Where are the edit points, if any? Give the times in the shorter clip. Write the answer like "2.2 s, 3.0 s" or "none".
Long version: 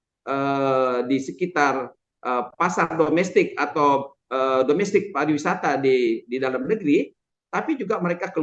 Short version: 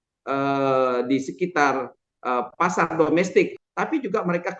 3.6 s